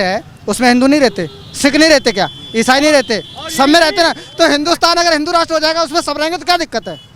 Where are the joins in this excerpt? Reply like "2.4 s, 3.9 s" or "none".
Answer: none